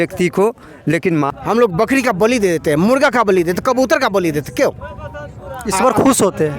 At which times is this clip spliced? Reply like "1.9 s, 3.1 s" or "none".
0.9 s